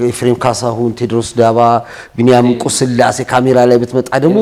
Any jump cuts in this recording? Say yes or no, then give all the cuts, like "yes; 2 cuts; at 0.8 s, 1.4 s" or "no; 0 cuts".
no; 0 cuts